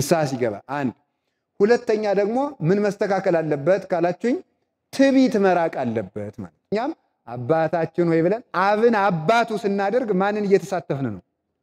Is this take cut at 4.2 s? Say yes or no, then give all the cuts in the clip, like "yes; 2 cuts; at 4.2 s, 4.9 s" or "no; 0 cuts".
no; 1 cut; at 6.7 s